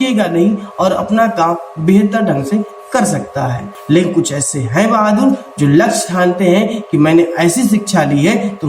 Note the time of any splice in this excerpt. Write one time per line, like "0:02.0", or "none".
0:03.7

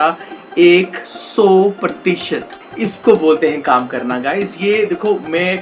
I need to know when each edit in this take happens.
0:02.5

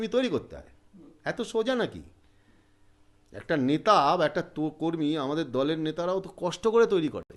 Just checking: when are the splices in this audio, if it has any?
none

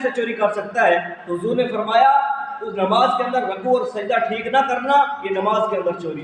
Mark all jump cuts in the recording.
none

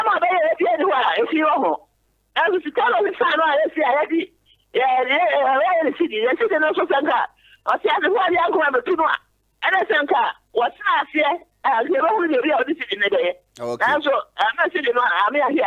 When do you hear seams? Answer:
none

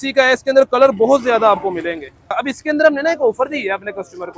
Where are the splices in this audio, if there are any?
0:02.3

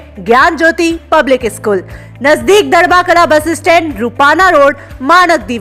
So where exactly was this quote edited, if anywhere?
none

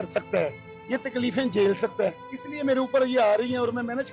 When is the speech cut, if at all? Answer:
none

